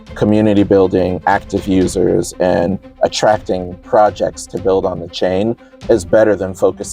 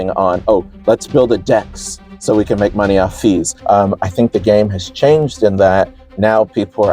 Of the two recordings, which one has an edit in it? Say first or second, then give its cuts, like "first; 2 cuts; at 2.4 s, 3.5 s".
second; 1 cut; at 3.5 s